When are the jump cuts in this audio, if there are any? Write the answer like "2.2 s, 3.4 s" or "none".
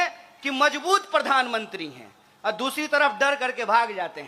none